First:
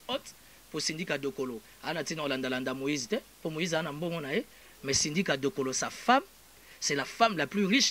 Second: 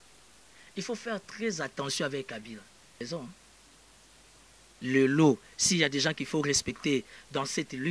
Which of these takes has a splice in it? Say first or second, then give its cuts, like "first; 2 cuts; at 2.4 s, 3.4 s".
second; 1 cut; at 3.0 s